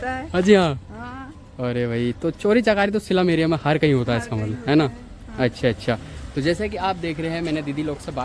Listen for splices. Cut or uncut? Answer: uncut